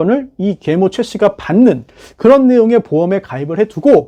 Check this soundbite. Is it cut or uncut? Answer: uncut